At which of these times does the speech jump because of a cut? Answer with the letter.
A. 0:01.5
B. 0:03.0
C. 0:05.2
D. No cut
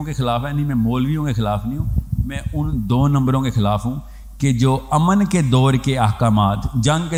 D